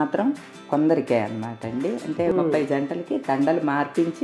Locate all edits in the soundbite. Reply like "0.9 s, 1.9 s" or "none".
2.1 s